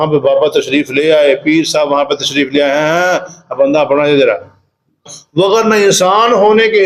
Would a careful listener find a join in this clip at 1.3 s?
no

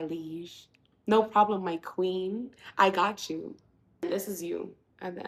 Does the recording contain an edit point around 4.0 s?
yes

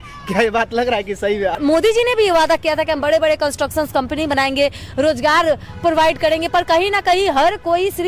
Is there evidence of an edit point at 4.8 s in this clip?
no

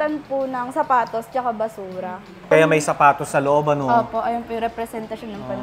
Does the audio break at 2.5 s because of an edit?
yes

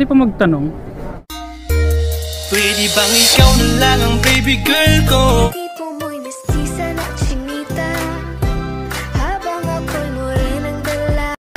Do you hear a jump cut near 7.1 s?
no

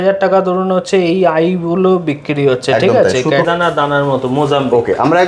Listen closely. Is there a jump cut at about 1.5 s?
no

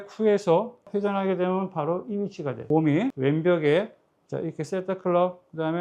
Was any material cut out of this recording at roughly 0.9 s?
yes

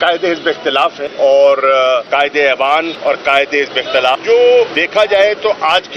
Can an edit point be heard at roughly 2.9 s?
yes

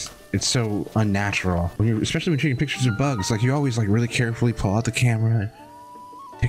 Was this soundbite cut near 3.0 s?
no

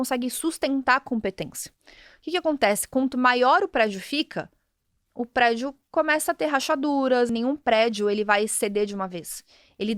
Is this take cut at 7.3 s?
yes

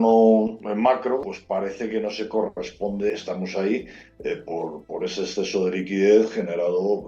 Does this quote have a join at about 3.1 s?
yes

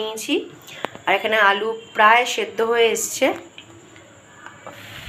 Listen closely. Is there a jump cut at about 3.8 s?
no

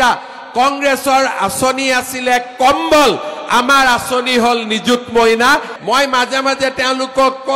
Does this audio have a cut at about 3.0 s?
no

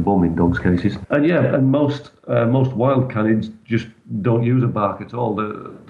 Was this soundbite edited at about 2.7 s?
no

